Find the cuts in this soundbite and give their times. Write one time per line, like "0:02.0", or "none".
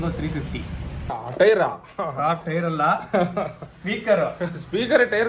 0:01.1